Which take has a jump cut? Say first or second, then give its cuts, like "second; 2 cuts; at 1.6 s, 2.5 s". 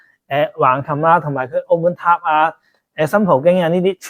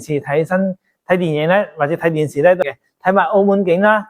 second; 1 cut; at 2.6 s